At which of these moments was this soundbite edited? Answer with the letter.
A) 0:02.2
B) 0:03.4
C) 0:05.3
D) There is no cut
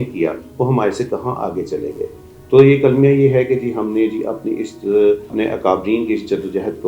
C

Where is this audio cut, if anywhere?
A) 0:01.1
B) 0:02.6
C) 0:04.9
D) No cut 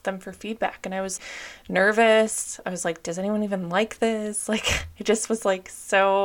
D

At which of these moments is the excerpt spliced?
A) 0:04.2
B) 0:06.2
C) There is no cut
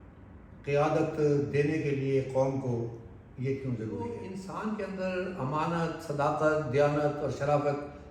A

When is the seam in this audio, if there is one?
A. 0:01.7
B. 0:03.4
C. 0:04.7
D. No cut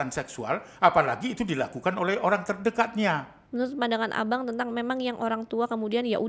B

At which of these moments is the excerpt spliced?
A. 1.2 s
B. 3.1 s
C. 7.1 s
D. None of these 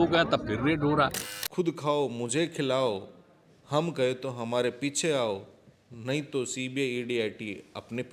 A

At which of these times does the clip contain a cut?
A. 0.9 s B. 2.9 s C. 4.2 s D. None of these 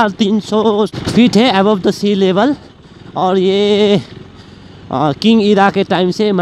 A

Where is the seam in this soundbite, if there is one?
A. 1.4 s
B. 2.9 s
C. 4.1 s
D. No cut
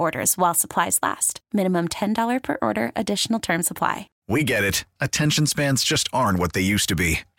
C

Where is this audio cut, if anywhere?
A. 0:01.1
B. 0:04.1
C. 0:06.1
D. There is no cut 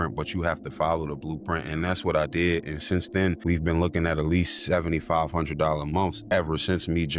C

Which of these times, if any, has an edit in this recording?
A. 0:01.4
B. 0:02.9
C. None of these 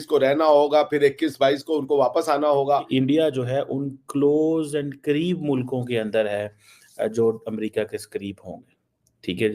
B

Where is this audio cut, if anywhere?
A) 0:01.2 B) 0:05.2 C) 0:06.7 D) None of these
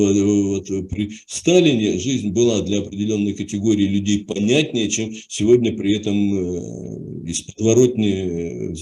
D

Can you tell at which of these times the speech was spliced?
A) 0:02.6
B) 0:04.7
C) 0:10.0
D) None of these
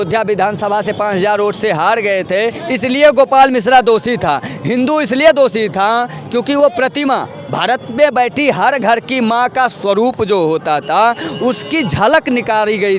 A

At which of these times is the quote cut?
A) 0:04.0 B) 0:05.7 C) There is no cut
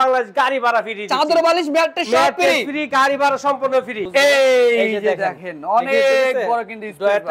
A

